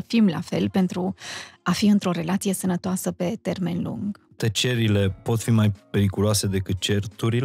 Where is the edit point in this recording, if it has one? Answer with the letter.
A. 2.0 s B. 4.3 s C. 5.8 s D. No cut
B